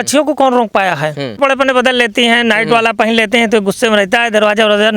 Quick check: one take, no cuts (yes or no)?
no